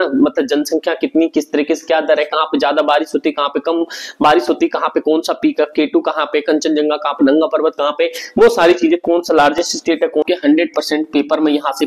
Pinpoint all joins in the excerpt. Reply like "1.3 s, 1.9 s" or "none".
10.2 s